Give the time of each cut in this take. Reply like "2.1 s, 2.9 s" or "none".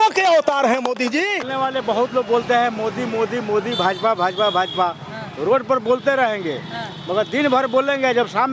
1.5 s